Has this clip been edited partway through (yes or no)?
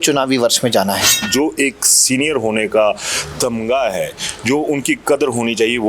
yes